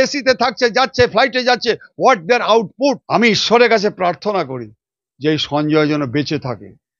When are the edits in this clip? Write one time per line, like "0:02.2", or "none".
0:02.7